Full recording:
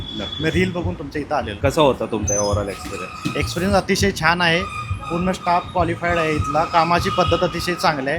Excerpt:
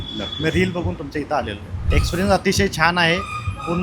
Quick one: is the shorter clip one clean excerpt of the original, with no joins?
no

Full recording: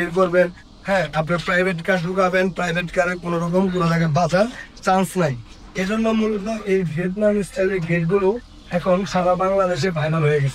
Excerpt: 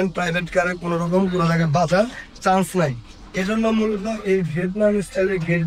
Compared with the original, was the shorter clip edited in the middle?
no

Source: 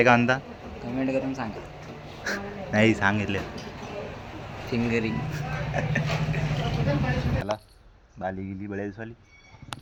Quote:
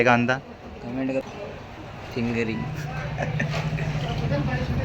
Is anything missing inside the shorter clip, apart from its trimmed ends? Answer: yes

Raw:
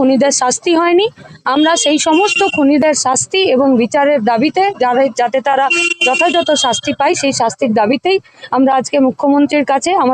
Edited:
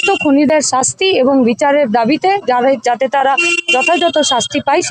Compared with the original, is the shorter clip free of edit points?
yes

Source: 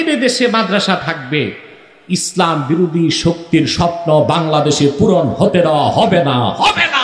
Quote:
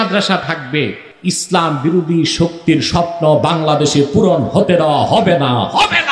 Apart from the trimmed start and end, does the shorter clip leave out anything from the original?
yes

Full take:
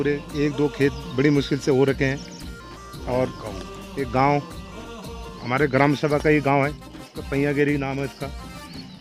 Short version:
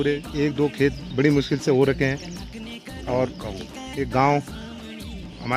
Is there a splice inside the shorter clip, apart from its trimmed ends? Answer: no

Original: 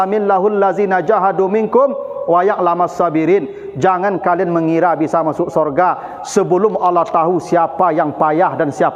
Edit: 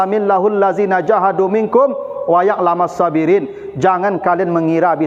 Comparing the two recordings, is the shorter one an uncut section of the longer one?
yes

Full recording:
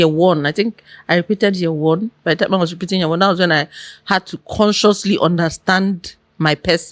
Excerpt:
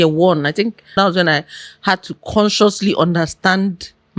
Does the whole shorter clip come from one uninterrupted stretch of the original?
no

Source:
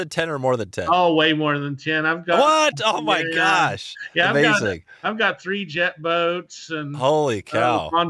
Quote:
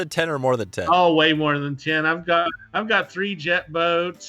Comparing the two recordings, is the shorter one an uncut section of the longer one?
no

